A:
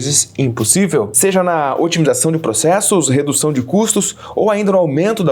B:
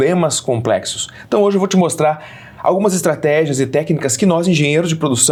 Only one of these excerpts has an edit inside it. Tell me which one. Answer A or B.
A